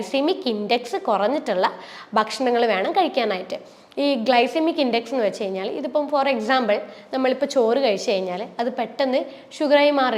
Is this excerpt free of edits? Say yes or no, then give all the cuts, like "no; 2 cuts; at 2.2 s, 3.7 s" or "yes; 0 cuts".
yes; 0 cuts